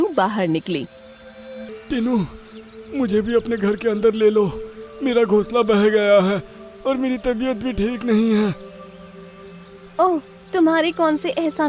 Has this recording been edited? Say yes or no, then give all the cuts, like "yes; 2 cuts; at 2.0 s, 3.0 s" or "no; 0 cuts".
yes; 1 cut; at 1.7 s